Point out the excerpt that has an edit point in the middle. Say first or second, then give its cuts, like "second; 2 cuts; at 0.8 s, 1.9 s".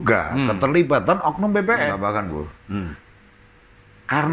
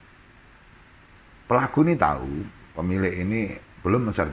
first; 1 cut; at 2.0 s